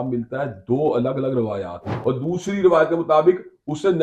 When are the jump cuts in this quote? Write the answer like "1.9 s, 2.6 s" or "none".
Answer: 2.0 s